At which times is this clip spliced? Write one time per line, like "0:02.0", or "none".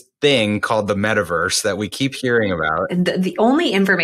0:02.7